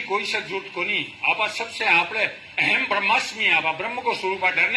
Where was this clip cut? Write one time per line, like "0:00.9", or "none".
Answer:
none